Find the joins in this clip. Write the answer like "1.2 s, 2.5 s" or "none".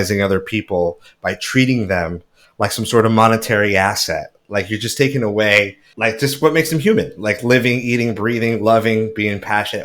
5.8 s